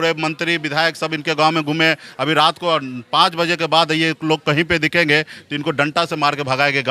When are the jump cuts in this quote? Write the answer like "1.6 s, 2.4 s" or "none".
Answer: none